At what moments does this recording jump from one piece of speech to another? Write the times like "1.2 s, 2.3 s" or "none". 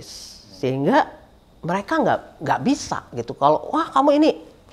none